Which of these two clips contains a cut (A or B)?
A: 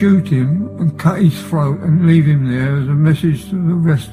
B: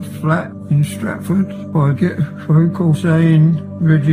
B